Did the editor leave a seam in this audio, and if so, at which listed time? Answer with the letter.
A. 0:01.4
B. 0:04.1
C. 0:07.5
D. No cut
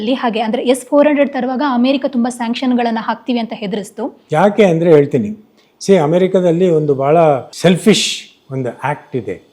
C